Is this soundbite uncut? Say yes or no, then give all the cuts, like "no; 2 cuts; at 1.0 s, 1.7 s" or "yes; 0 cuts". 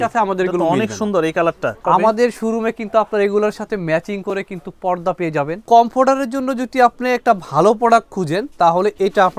no; 2 cuts; at 1.8 s, 5.6 s